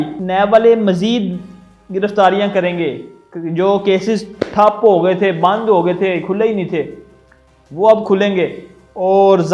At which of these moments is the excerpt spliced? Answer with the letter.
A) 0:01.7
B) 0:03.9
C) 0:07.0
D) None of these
D